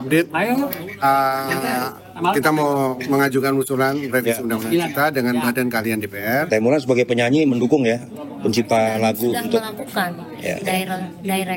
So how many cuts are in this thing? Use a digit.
1